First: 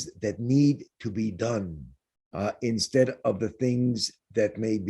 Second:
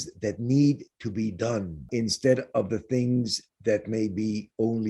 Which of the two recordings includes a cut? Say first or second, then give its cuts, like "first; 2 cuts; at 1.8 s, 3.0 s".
second; 1 cut; at 1.9 s